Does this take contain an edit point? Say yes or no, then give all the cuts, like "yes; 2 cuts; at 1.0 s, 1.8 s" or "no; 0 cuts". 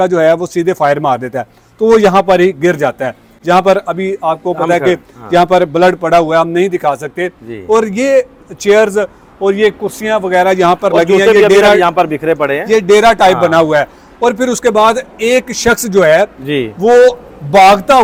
no; 0 cuts